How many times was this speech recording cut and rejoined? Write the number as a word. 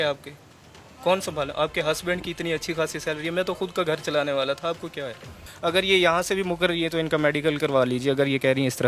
one